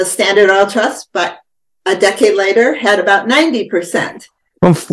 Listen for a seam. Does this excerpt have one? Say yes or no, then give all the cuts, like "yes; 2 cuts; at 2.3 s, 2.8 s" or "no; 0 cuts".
no; 0 cuts